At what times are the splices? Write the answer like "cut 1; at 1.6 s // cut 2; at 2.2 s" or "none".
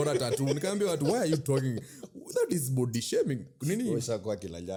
none